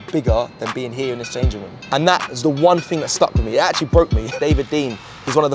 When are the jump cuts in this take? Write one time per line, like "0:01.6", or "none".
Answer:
0:01.8
0:04.3